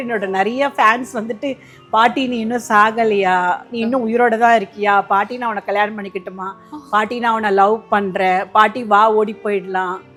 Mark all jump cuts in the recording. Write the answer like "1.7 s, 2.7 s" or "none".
none